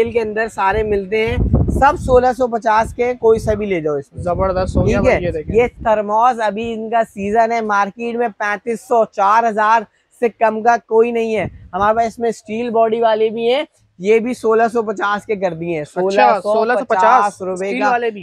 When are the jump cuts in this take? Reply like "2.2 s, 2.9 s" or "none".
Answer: none